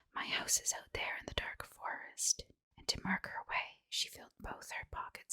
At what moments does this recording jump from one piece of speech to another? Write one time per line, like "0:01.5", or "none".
0:02.6